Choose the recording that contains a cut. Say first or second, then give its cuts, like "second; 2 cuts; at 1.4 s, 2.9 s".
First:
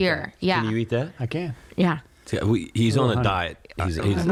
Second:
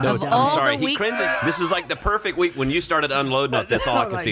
second; 1 cut; at 1.2 s